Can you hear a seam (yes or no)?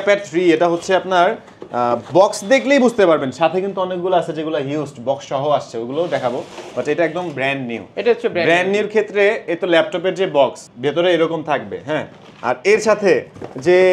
no